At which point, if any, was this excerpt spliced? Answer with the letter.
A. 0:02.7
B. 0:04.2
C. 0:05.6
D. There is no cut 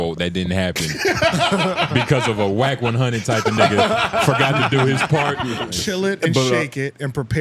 C